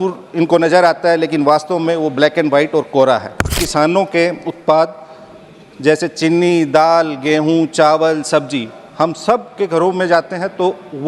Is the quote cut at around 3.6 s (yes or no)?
yes